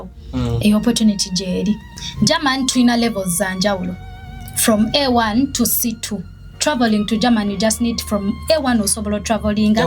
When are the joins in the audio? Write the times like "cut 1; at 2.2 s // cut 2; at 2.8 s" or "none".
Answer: cut 1; at 1.9 s // cut 2; at 6.4 s